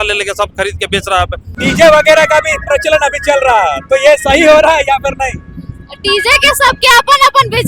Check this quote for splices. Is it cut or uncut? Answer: cut